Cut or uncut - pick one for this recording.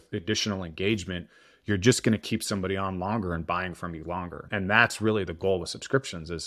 cut